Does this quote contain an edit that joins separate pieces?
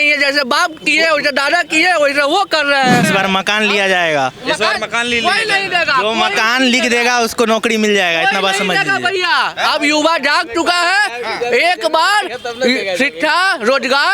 yes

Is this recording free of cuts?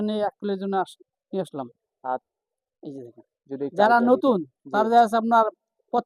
no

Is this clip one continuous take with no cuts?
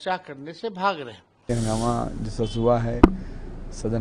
no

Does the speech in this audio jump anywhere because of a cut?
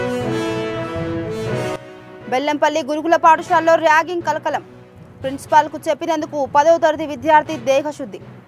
yes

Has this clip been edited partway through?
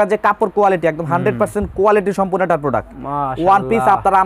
no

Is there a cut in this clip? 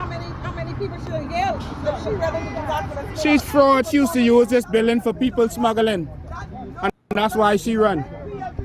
no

